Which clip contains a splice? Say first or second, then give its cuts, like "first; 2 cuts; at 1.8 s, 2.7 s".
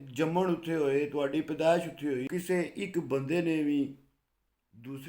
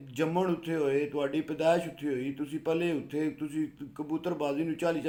first; 1 cut; at 2.3 s